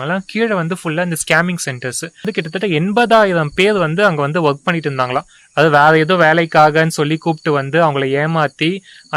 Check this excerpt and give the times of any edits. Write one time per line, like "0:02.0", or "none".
0:02.2